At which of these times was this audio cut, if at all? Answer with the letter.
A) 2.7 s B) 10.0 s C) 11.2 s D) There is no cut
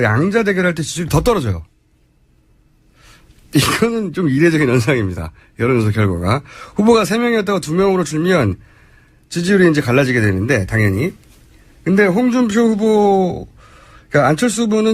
B